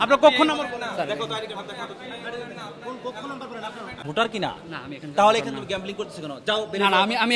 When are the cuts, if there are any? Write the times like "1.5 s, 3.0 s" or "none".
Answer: 4.0 s